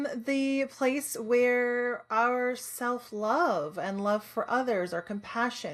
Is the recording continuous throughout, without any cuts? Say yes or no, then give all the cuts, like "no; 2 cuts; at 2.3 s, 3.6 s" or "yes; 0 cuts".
yes; 0 cuts